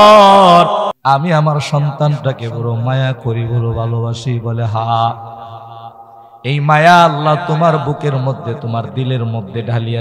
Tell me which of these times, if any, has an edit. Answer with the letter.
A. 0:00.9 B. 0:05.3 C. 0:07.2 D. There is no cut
A